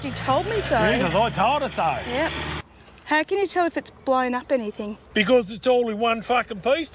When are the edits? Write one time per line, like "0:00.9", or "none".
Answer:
0:02.5
0:05.0